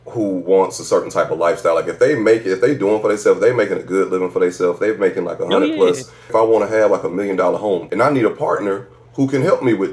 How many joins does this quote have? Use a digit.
3